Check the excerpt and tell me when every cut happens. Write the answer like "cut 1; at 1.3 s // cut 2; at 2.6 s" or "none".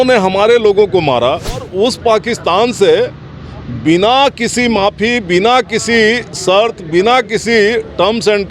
cut 1; at 1.7 s